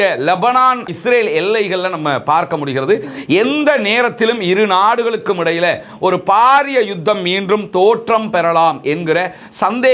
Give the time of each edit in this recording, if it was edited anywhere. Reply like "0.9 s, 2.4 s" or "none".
none